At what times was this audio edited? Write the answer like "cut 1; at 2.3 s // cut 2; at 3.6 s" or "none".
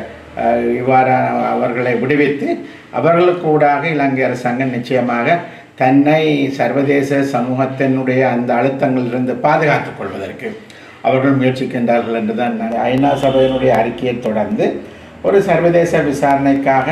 cut 1; at 12.7 s